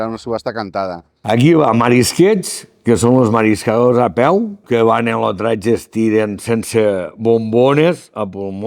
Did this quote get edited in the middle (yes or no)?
yes